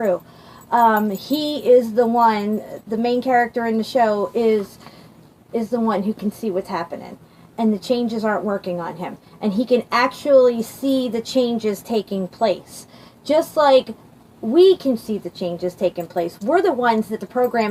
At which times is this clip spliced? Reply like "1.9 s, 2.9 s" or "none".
2.6 s

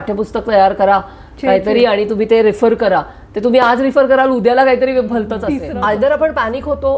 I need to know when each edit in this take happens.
5.7 s

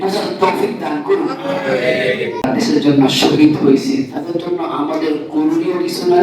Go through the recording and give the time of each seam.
2.5 s

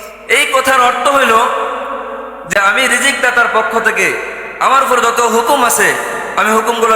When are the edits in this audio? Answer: 2.5 s

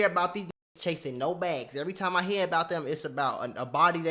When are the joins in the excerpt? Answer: none

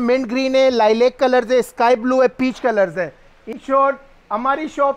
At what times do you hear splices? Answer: 3.5 s

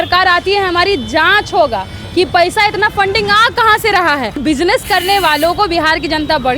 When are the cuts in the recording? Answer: 4.4 s

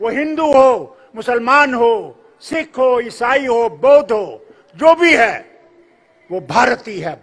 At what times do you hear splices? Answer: none

